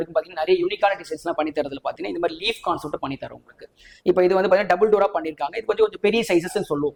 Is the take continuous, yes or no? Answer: yes